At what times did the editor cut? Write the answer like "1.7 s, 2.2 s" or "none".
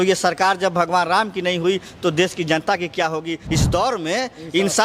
3.4 s

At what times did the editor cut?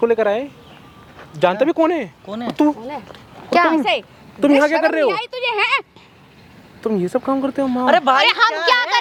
none

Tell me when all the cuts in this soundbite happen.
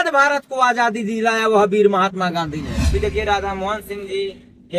2.9 s

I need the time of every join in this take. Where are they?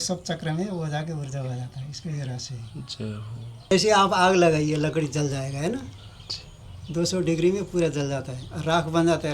3.7 s

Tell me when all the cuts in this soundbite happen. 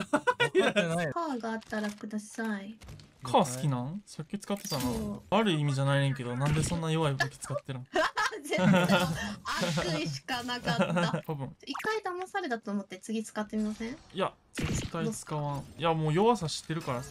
1.1 s, 5.3 s, 11.2 s, 15.7 s

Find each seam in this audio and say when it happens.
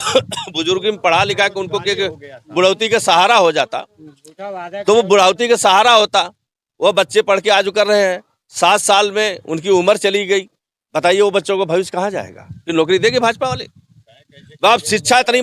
none

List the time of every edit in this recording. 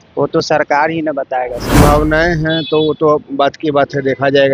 1.7 s

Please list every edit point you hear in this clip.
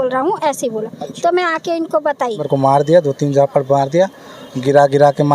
2.4 s

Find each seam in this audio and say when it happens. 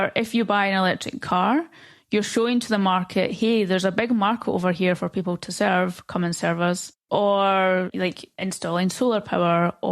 7.0 s

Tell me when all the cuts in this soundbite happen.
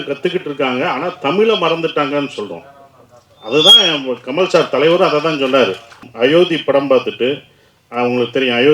6.0 s

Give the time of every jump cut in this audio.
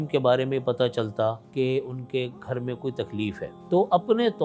1.4 s, 3.5 s

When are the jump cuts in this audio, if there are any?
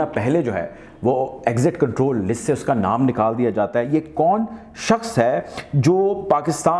none

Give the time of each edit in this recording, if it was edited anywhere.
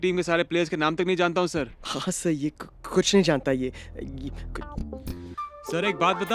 4.6 s

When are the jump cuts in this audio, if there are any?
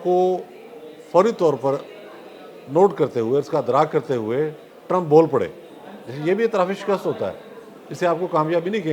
none

